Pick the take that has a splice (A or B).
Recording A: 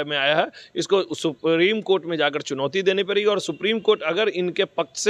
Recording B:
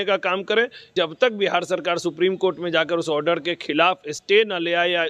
B